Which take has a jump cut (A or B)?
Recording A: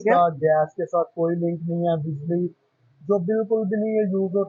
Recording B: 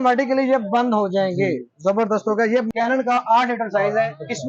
B